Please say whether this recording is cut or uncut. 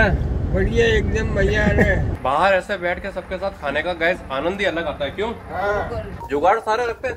cut